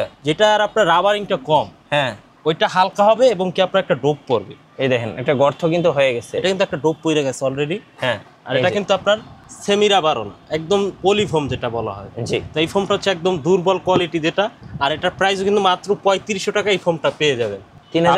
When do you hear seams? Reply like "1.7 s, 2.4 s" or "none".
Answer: none